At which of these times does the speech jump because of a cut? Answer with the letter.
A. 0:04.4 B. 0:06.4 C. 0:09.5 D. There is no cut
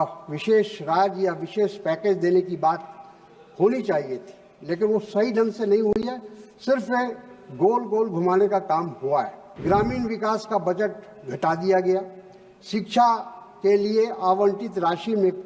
C